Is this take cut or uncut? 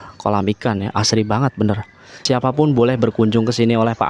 cut